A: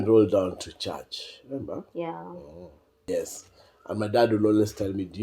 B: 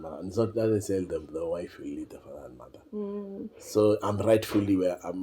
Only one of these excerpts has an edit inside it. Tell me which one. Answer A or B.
A